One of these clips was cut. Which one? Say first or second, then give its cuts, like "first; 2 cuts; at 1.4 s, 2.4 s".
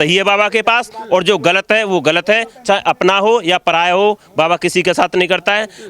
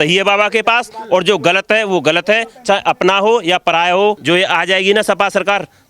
second; 1 cut; at 4.2 s